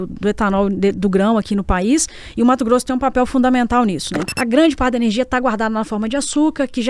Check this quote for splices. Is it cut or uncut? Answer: cut